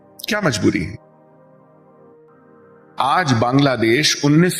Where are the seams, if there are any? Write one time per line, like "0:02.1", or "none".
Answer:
0:02.1